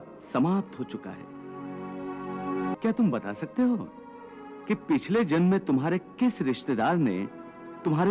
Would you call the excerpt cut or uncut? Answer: cut